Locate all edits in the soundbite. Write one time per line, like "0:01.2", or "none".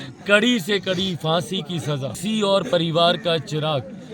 0:02.2